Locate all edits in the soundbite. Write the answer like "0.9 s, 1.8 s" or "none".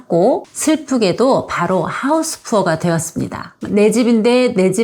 3.6 s